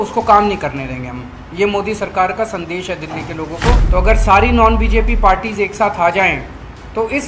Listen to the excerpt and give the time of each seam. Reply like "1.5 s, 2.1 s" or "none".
3.8 s